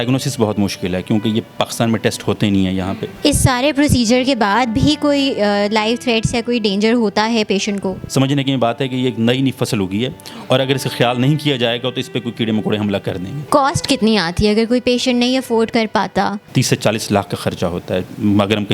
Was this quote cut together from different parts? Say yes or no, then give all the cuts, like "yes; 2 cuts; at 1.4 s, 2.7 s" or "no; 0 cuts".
yes; 4 cuts; at 3.1 s, 8.0 s, 13.5 s, 16.4 s